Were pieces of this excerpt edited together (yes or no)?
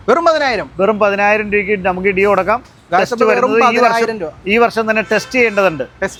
no